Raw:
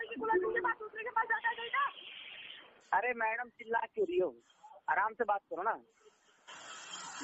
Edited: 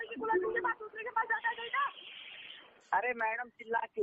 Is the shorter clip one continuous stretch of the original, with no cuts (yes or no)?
yes